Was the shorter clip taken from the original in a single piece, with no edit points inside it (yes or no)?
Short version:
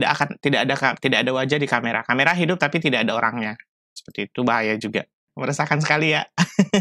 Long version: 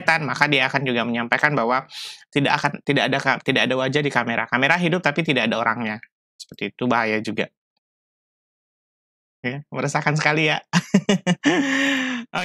no